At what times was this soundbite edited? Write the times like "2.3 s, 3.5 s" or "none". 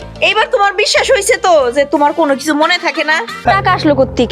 3.4 s